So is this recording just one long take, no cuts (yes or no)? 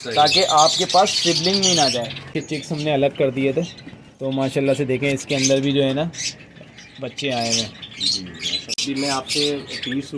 no